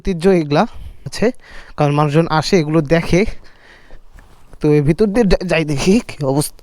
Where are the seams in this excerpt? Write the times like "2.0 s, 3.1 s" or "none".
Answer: 1.0 s

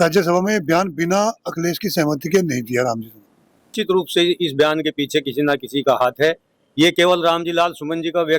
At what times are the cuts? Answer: 3.7 s

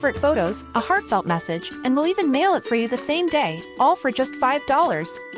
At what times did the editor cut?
none

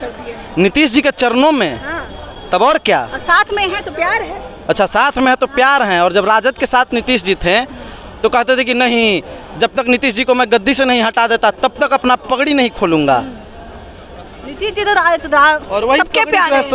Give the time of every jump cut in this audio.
none

